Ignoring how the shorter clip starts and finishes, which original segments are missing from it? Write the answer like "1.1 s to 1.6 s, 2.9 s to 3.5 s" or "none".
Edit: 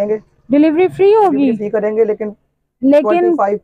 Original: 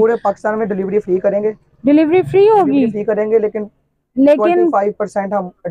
none